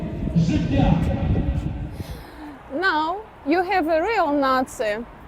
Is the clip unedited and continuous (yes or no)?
no